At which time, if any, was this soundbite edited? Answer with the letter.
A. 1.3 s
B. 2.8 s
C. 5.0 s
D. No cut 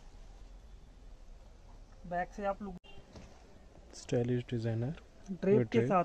B